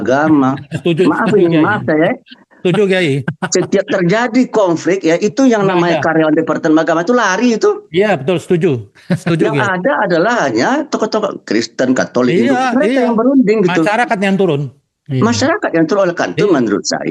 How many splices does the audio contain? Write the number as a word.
zero